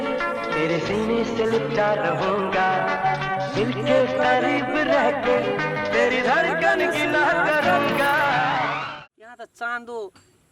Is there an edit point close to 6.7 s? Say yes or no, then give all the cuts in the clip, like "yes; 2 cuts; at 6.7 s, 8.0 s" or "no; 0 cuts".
no; 1 cut; at 8.8 s